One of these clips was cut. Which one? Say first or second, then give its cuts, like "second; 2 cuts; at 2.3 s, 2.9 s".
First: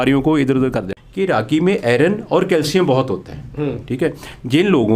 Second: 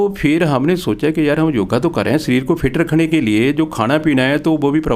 first; 1 cut; at 0.9 s